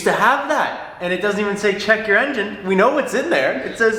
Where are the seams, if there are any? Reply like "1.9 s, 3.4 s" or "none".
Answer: none